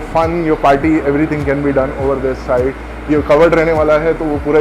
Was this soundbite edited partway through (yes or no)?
no